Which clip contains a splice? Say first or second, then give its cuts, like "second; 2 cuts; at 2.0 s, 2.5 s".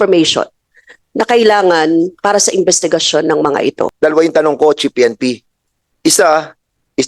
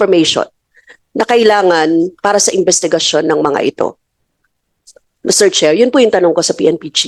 first; 1 cut; at 3.9 s